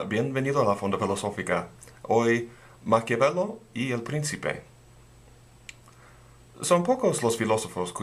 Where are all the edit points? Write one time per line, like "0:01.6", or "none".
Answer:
none